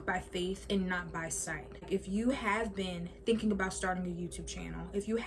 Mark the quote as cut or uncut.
cut